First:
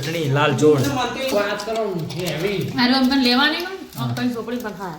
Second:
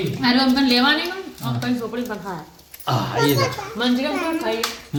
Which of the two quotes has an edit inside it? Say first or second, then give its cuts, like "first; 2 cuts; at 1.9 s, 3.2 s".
first; 1 cut; at 1.3 s